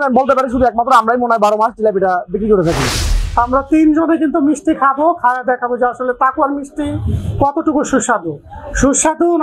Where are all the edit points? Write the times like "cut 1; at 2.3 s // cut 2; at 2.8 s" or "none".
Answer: cut 1; at 3.0 s